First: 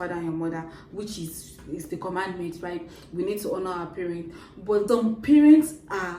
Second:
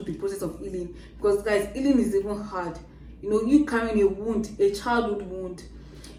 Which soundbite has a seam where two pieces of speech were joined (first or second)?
first